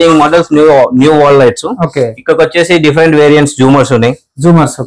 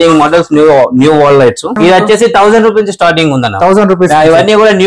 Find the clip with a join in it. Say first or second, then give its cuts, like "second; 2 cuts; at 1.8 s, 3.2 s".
second; 1 cut; at 1.7 s